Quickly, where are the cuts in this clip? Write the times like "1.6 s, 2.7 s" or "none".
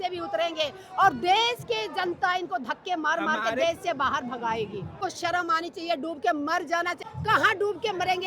5.0 s, 7.0 s